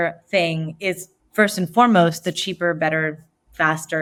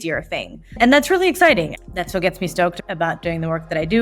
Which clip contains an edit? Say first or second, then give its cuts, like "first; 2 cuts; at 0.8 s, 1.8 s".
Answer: second; 2 cuts; at 1.7 s, 2.8 s